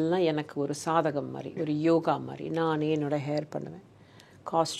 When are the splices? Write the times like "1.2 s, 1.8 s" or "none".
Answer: none